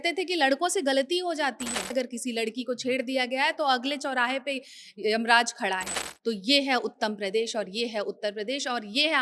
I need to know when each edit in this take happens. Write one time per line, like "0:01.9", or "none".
0:01.9